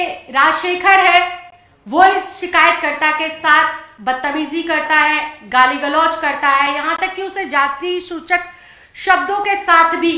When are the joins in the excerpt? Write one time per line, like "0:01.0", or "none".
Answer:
none